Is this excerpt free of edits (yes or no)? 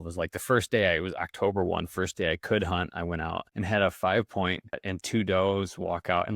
no